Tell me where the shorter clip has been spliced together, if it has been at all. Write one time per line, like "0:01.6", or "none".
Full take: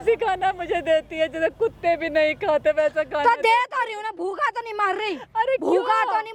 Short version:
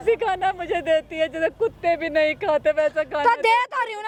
none